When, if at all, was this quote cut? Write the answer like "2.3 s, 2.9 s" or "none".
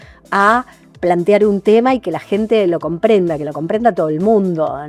none